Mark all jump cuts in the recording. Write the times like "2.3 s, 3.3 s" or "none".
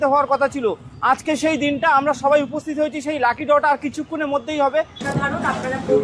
5.0 s